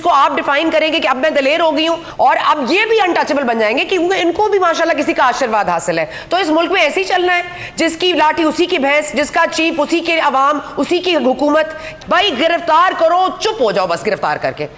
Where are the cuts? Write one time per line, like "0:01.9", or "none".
0:02.0
0:11.9

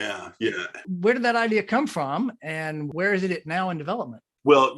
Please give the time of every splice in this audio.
0:02.9

